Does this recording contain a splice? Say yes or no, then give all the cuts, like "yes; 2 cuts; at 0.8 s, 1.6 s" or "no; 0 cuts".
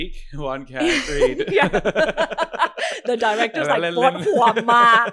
no; 0 cuts